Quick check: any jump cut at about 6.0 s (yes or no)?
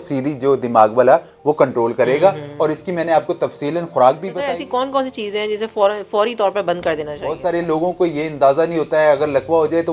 no